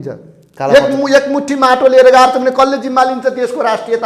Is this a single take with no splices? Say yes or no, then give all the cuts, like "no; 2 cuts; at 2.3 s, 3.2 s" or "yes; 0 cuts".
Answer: yes; 0 cuts